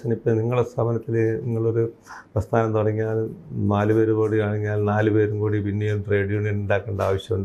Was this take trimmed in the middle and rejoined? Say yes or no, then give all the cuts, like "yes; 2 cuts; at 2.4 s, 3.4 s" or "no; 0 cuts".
no; 0 cuts